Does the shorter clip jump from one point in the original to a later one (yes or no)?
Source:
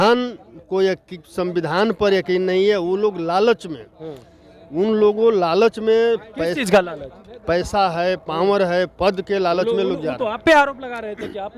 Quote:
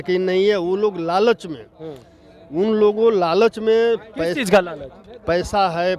no